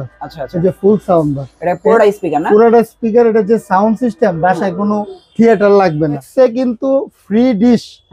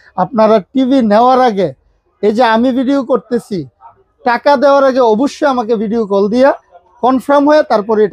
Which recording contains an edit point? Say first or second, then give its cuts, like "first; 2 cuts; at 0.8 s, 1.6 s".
first; 1 cut; at 6.3 s